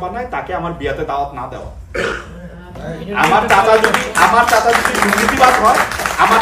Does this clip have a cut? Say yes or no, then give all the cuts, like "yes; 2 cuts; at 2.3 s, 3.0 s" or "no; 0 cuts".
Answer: no; 0 cuts